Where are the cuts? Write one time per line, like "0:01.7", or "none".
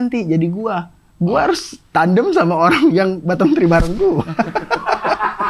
none